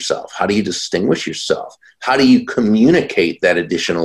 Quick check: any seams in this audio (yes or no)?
no